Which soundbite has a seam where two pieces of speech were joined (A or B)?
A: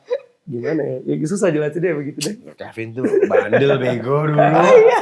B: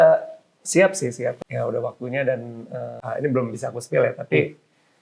B